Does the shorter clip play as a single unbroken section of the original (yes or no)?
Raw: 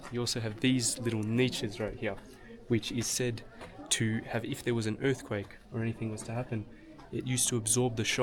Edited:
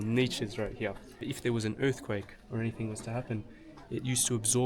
no